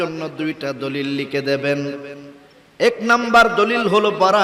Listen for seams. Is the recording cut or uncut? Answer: uncut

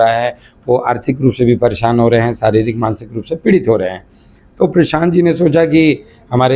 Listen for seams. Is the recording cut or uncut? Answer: uncut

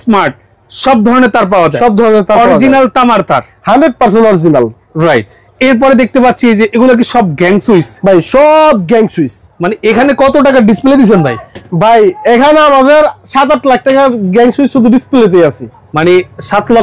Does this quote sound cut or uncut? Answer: uncut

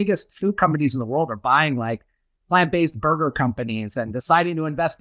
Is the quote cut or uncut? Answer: uncut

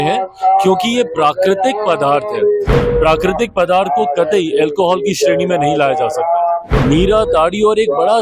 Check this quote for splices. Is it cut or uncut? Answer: cut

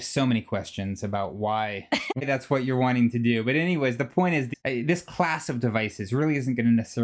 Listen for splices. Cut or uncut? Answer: cut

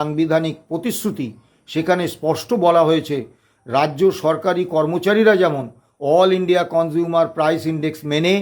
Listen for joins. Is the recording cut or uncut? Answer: uncut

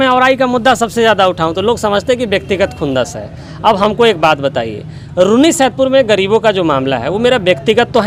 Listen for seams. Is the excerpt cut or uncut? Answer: uncut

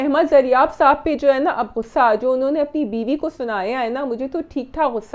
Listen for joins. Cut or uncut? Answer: uncut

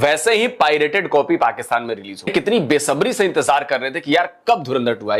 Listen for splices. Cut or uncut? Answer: cut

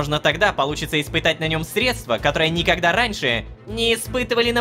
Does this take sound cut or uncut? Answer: uncut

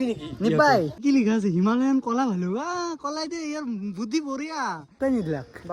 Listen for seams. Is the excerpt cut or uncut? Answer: cut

